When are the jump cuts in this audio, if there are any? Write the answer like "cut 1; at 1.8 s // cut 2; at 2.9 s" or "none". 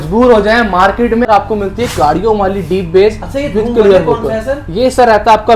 cut 1; at 1.3 s